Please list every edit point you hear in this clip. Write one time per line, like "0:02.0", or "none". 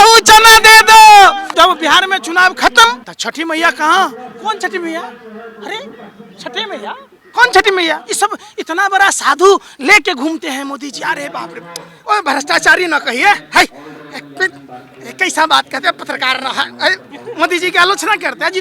0:01.4
0:03.1
0:08.1

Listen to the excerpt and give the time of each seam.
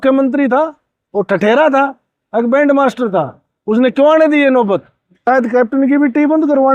0:05.2

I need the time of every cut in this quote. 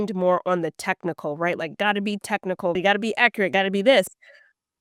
0:02.8

